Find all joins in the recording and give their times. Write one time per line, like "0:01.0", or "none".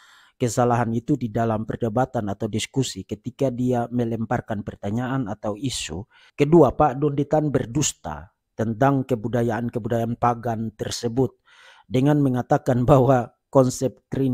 0:06.2